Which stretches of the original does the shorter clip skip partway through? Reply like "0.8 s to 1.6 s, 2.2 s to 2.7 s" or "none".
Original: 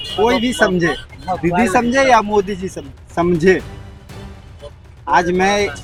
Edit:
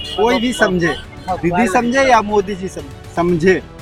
none